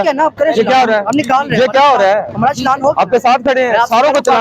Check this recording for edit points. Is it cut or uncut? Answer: uncut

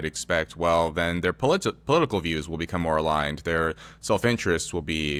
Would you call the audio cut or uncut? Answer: uncut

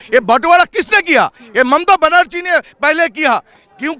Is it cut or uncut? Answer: uncut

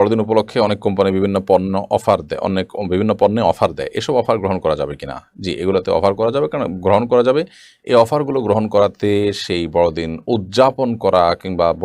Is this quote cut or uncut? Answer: uncut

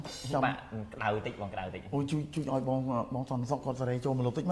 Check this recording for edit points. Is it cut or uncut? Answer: uncut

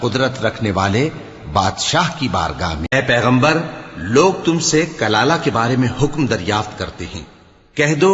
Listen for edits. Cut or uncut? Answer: cut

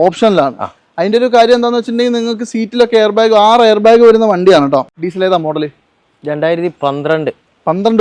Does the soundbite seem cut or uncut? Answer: cut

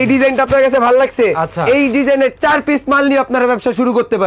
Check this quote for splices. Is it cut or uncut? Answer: uncut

